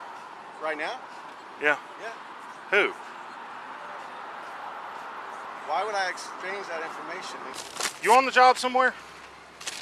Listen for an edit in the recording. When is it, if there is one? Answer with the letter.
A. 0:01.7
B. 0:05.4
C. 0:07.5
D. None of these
C